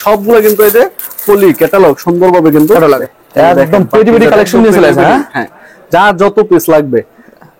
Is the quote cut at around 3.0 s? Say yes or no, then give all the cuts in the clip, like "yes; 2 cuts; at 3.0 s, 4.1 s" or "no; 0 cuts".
yes; 1 cut; at 3.0 s